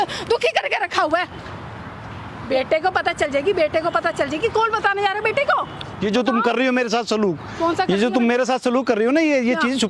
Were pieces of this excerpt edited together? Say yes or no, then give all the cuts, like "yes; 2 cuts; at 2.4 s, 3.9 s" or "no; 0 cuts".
no; 0 cuts